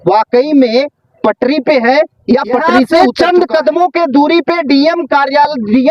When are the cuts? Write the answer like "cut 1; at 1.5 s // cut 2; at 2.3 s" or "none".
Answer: cut 1; at 2.9 s

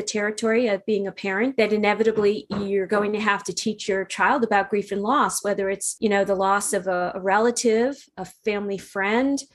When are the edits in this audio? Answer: cut 1; at 1.5 s // cut 2; at 5.9 s

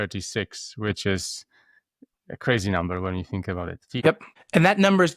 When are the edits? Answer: cut 1; at 3.8 s

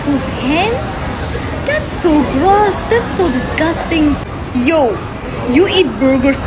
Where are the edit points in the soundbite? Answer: none

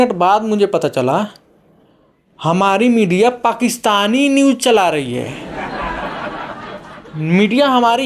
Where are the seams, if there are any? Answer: cut 1; at 5.4 s // cut 2; at 7.1 s

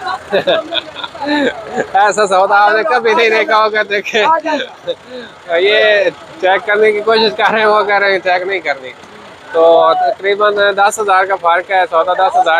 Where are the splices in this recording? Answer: none

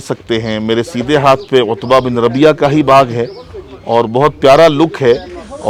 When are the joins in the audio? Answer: none

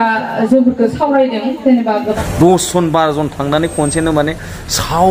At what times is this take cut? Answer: cut 1; at 2.1 s

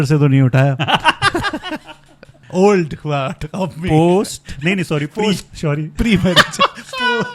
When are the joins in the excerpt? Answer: cut 1; at 2.3 s

